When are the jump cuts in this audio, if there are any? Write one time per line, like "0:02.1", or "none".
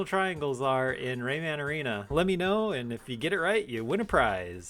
0:02.0